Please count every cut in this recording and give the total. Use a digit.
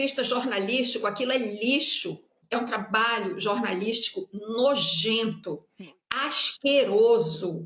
1